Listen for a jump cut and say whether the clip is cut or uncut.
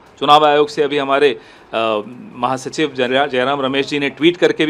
uncut